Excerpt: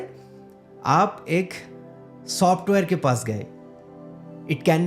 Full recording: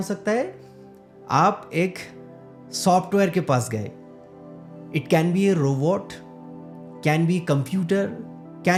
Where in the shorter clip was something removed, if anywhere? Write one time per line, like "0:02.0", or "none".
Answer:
none